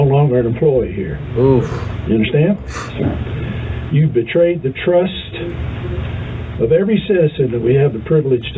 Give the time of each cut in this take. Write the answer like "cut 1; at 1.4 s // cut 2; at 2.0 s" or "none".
none